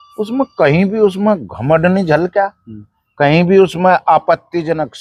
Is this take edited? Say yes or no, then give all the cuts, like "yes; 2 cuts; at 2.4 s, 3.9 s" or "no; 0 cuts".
no; 0 cuts